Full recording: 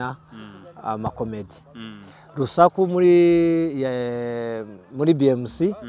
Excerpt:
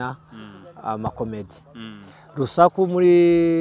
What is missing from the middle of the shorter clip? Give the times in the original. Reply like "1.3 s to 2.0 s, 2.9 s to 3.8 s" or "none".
none